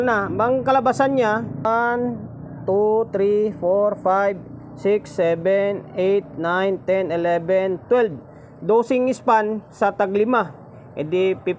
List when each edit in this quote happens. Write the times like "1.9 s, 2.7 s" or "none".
1.7 s